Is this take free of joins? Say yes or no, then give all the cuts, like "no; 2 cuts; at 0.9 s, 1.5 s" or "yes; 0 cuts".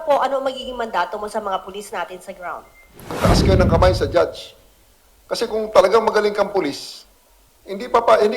no; 1 cut; at 3.1 s